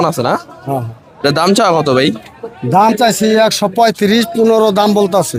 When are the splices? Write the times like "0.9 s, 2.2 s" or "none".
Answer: none